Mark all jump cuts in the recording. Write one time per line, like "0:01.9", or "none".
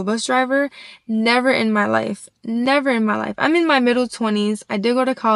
none